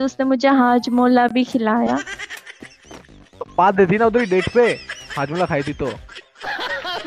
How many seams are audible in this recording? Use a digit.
0